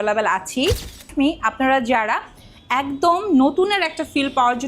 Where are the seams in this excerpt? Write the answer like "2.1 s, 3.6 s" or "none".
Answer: 1.1 s